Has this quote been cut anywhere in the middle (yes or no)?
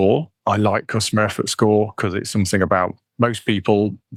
no